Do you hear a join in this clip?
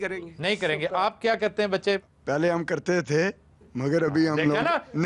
no; 0 cuts

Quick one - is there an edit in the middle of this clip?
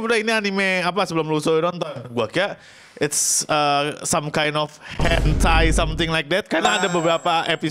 no; 0 cuts

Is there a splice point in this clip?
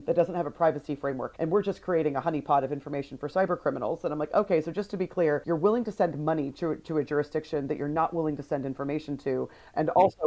no; 0 cuts

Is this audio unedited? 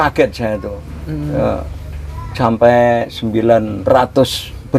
yes; 0 cuts

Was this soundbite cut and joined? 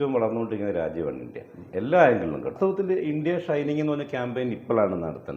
yes; 1 cut; at 2.7 s

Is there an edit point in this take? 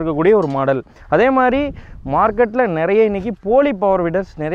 yes; 1 cut; at 0.9 s

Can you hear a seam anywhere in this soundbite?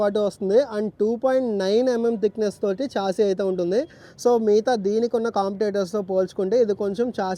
no; 0 cuts

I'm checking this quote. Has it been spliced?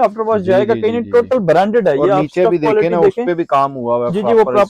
no; 0 cuts

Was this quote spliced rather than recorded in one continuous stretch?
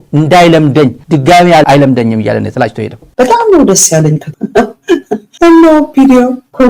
yes; 1 cut; at 3.0 s

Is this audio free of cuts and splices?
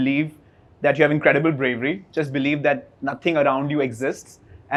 yes; 0 cuts

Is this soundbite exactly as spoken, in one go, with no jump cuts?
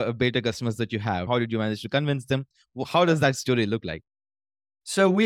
no; 1 cut; at 1.3 s

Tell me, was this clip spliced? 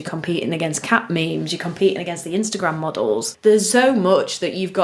yes; 1 cut; at 3.3 s

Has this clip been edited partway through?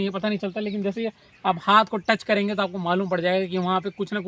no; 0 cuts

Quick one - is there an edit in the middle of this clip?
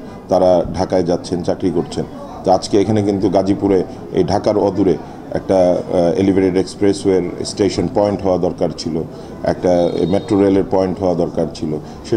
no; 0 cuts

